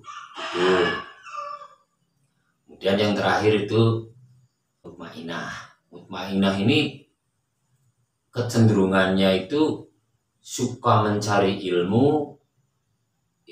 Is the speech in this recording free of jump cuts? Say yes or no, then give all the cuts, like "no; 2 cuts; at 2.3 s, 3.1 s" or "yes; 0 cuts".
no; 1 cut; at 4.9 s